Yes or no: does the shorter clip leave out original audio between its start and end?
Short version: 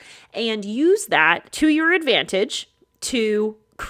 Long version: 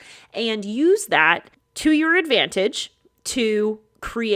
yes